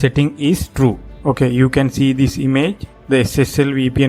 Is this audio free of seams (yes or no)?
no